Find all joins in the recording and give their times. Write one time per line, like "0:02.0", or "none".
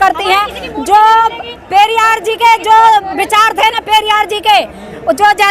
none

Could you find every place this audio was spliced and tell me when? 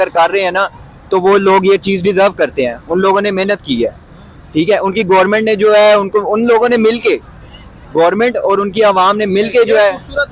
none

